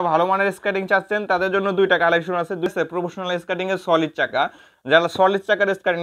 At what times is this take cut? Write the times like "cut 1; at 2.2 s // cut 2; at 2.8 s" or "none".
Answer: cut 1; at 2.7 s

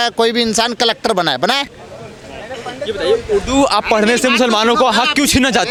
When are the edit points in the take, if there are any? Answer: none

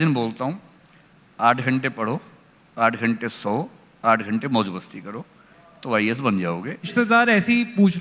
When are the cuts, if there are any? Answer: cut 1; at 6.9 s

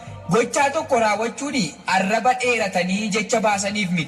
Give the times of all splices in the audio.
cut 1; at 1.4 s

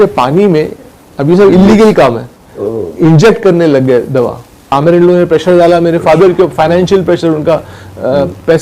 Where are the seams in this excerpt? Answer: cut 1; at 4.8 s

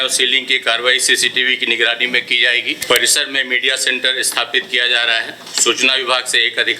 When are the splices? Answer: cut 1; at 2.8 s

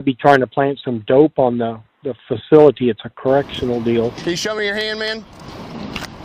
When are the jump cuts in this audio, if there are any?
cut 1; at 4.2 s

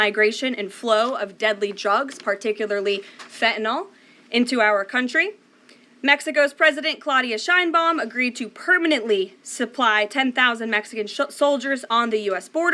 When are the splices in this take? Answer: cut 1; at 8.8 s

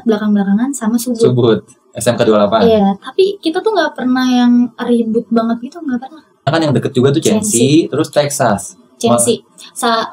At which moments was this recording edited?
cut 1; at 6.5 s

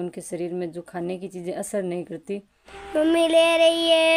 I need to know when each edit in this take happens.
cut 1; at 2.9 s

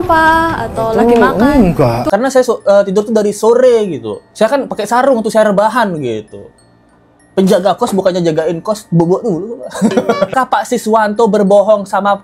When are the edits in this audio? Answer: cut 1; at 2.0 s // cut 2; at 10.3 s

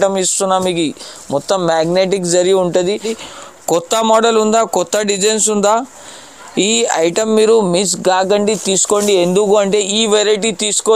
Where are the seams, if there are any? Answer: cut 1; at 3.2 s

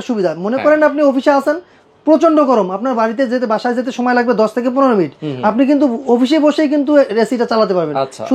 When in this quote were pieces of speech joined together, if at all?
none

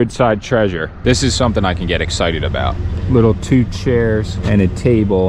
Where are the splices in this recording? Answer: cut 1; at 0.9 s // cut 2; at 2.9 s // cut 3; at 4.3 s

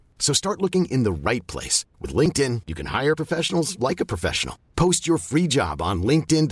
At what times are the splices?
none

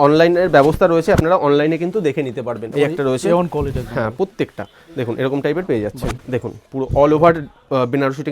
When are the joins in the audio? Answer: cut 1; at 2.7 s // cut 2; at 6.1 s

